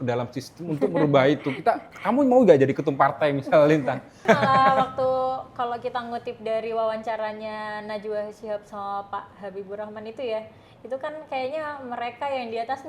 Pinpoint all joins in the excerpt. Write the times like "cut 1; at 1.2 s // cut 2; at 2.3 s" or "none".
cut 1; at 4.2 s